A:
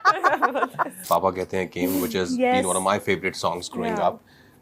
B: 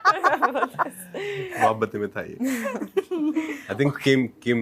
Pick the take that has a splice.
A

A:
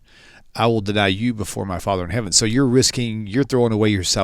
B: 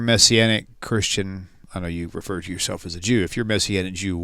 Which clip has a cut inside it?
B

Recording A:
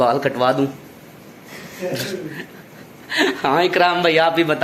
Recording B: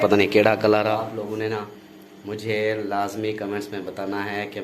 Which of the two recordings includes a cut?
B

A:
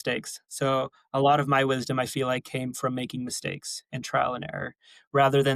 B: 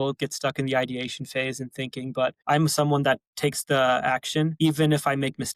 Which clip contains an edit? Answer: B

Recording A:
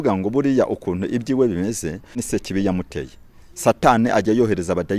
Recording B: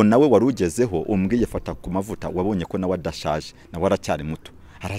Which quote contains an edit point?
A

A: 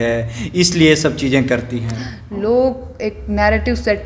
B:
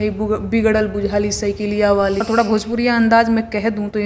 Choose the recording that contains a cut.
B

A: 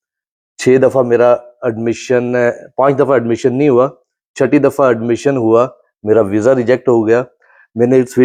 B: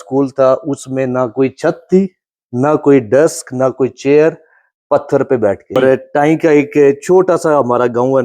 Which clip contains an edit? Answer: B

